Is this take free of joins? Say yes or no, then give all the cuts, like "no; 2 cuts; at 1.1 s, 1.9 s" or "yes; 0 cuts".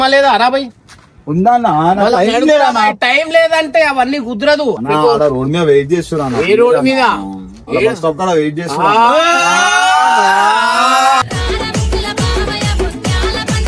yes; 0 cuts